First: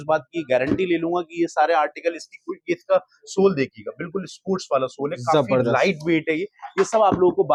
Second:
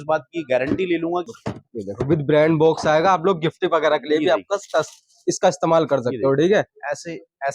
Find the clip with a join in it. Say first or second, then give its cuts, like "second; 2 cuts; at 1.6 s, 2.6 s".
second; 1 cut; at 1.3 s